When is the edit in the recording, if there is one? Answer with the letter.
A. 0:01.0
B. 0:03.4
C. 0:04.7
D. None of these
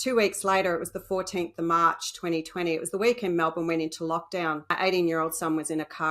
C